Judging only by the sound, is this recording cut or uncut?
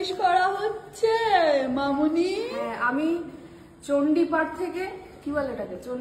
uncut